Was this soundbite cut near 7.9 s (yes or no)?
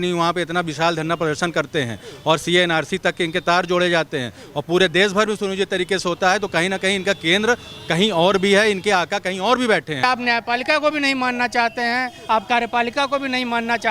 no